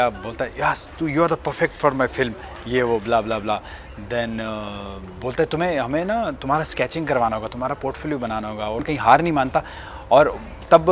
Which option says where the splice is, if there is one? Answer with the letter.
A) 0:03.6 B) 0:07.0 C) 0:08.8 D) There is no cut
C